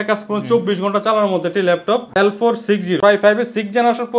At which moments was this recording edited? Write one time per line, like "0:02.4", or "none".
0:02.4